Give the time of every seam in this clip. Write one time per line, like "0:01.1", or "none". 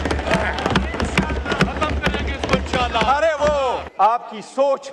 0:03.8